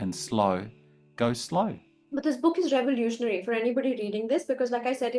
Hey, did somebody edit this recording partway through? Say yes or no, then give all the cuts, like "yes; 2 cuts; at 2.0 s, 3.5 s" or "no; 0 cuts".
yes; 1 cut; at 1.9 s